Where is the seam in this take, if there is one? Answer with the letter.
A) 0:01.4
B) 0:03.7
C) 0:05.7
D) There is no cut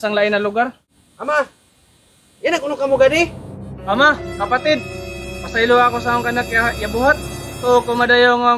B